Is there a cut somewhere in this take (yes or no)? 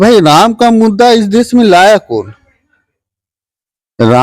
no